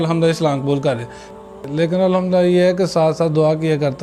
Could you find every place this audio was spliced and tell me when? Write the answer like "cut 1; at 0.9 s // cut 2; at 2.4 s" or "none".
cut 1; at 1.7 s